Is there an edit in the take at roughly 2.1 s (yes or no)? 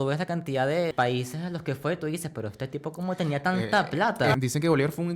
no